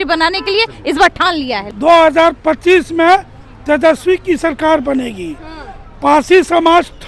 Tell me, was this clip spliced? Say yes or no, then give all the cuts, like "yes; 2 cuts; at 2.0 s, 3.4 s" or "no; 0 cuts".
yes; 1 cut; at 1.7 s